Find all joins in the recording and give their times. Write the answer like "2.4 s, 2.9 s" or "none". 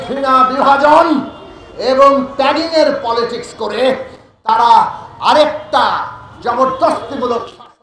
none